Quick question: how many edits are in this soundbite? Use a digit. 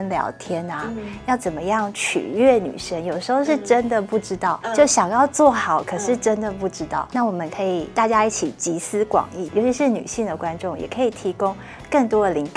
4